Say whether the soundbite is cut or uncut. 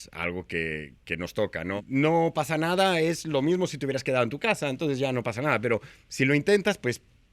cut